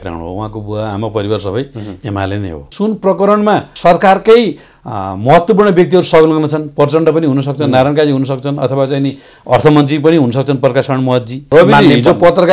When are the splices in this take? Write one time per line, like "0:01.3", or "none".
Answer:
0:02.7
0:03.7
0:11.4